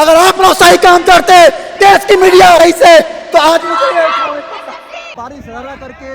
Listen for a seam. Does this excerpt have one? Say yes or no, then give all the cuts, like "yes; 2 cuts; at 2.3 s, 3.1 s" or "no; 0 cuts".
yes; 2 cuts; at 2.6 s, 5.1 s